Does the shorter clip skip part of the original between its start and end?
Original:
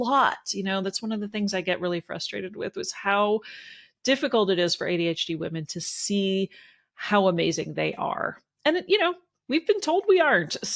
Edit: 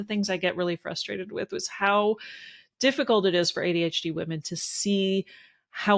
no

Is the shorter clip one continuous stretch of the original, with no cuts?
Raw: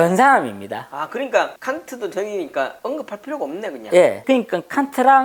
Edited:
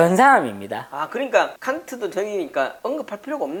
yes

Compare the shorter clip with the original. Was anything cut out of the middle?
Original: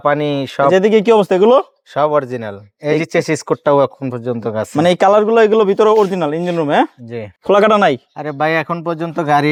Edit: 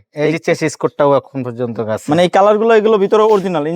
no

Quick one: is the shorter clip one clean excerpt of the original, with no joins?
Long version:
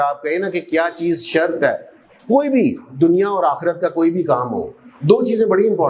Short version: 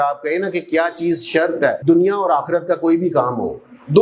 no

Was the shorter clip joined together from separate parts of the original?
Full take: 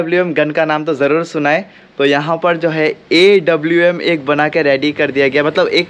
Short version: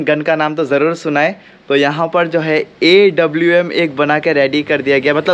no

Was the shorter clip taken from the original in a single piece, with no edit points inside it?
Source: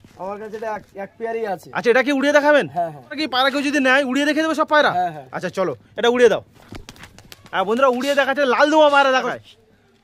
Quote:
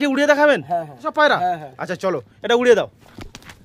no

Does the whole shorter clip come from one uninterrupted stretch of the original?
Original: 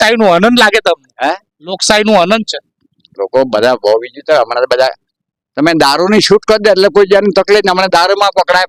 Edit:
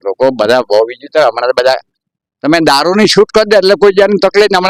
yes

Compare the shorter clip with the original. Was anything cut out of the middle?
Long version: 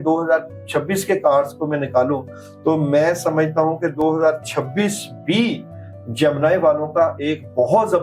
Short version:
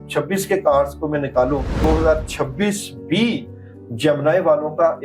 yes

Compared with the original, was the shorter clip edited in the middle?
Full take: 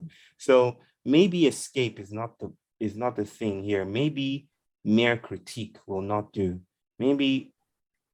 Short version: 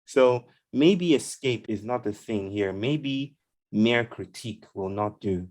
yes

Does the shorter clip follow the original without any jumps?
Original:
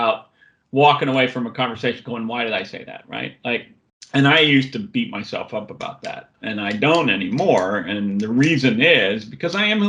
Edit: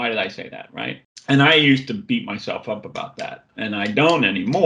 no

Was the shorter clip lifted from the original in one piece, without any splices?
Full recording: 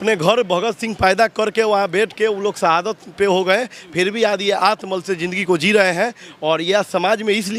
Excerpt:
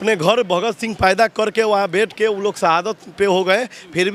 yes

